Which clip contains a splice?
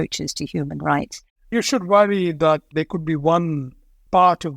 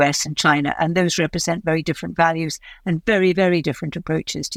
first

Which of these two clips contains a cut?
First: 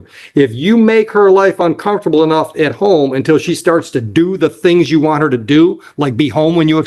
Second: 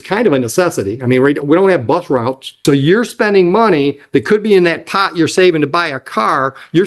second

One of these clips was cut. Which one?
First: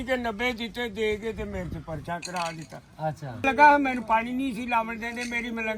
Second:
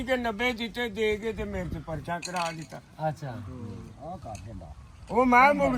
first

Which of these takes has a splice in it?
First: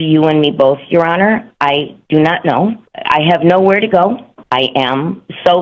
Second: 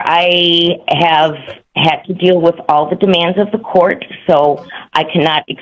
first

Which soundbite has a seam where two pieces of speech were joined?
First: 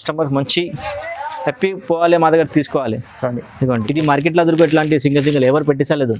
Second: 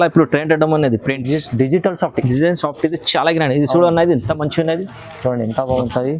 first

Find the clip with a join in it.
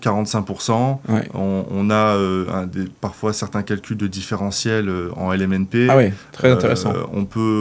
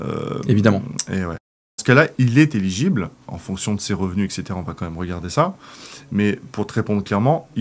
second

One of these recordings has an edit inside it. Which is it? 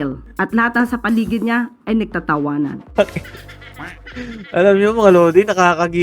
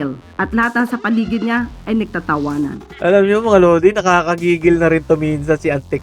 second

